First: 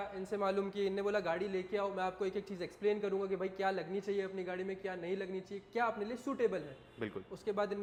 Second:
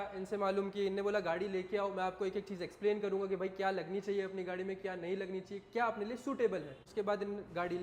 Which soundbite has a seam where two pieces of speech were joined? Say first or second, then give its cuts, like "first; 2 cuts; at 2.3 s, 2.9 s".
second; 1 cut; at 6.8 s